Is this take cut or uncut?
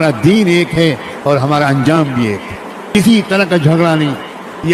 cut